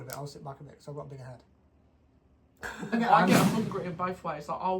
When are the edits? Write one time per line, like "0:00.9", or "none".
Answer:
0:02.9